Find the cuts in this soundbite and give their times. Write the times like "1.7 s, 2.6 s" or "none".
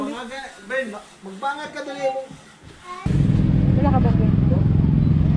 3.1 s

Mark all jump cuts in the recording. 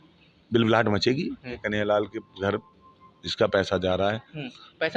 1.5 s

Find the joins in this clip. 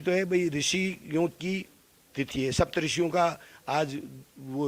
none

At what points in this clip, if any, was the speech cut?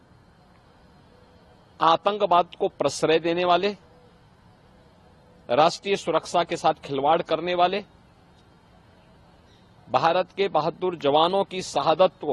none

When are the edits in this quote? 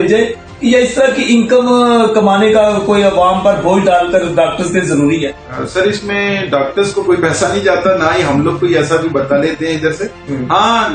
5.5 s

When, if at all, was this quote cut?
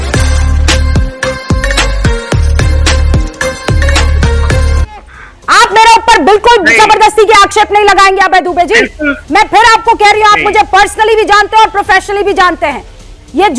5.1 s

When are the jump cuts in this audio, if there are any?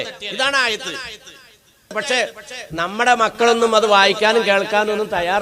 1.9 s

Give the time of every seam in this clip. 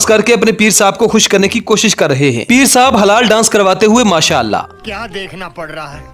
4.8 s

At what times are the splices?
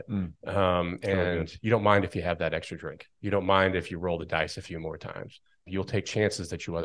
5.7 s

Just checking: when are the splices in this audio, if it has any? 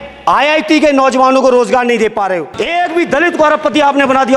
2.5 s

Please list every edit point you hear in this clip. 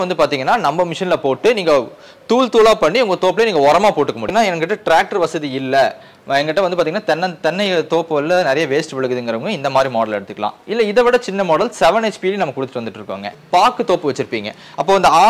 4.3 s, 13.4 s

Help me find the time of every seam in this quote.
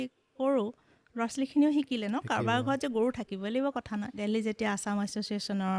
4.1 s

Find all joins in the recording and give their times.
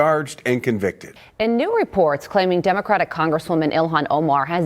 1.1 s

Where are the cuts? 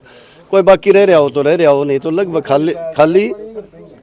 none

